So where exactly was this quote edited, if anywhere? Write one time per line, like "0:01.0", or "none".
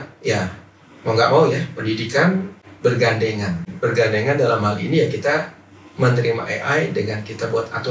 0:02.6
0:03.7